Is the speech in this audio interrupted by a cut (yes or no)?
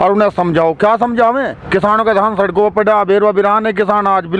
no